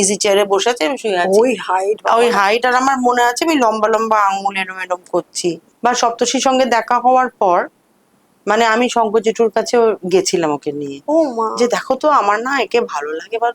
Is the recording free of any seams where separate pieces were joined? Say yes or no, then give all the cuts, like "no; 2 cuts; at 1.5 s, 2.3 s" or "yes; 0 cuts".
no; 1 cut; at 5.7 s